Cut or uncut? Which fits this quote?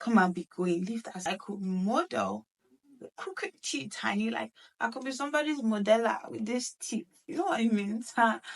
cut